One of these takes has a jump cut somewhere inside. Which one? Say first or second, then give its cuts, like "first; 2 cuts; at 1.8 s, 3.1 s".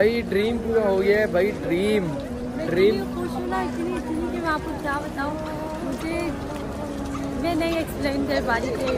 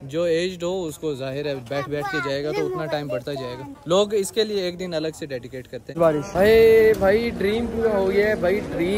second; 1 cut; at 6.0 s